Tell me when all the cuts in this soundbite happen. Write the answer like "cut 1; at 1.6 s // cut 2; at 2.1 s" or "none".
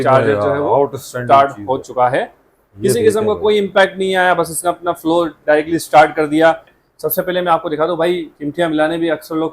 cut 1; at 6.7 s